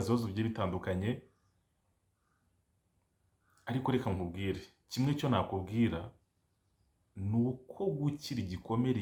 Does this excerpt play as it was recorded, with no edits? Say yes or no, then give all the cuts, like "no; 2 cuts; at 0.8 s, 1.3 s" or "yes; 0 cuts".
yes; 0 cuts